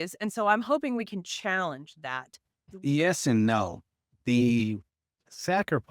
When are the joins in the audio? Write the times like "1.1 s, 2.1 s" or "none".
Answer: 2.5 s